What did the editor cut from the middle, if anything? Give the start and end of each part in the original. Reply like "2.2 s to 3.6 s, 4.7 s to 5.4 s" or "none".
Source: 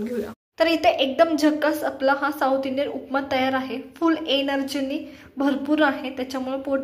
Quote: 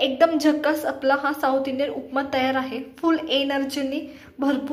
none